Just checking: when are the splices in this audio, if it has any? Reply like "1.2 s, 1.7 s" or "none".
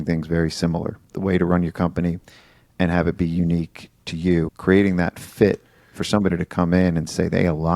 1.1 s, 4.5 s